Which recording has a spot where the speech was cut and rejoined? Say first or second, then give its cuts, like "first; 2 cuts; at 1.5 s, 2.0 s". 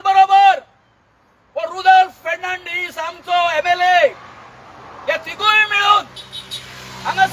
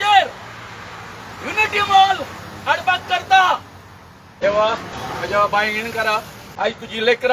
second; 3 cuts; at 4.3 s, 4.9 s, 6.4 s